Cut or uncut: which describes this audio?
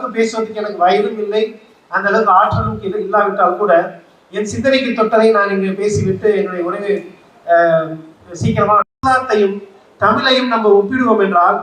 cut